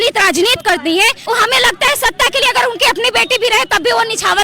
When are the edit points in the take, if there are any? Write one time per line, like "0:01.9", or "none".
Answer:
0:01.2